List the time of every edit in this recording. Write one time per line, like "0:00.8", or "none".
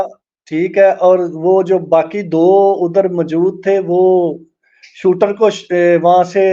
none